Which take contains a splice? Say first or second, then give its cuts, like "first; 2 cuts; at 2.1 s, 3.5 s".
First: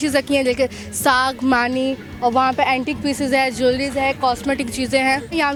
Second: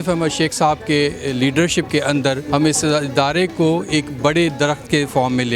second; 1 cut; at 2.4 s